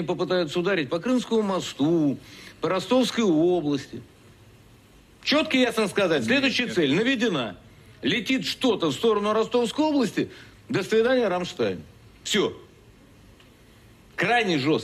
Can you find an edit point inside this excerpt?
no; 0 cuts

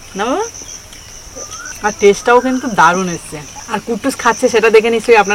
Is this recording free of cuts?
yes; 0 cuts

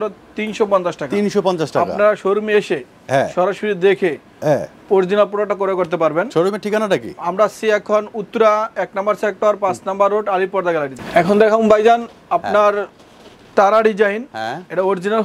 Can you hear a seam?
no; 0 cuts

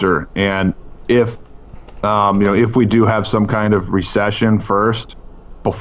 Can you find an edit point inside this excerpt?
no; 0 cuts

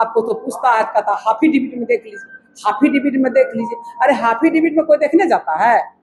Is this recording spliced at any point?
no; 0 cuts

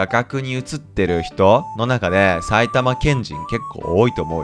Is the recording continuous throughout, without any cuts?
yes; 0 cuts

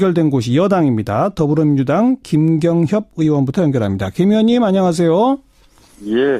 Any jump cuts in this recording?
no; 0 cuts

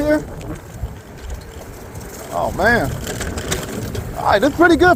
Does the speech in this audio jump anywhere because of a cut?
no; 0 cuts

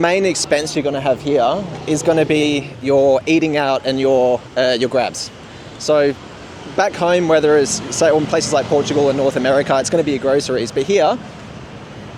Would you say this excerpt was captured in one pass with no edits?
yes; 0 cuts

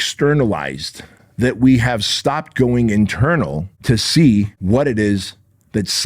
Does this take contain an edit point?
yes; 2 cuts; at 3.7 s, 4.6 s

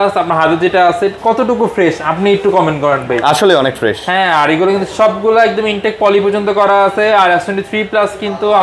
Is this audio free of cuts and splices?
yes; 0 cuts

